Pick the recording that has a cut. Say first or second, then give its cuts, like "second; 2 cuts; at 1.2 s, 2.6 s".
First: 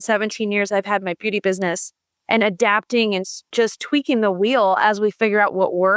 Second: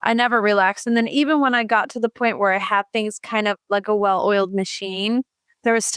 first; 1 cut; at 3.5 s